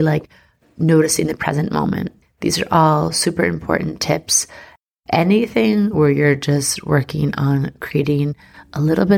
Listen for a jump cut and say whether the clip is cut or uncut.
cut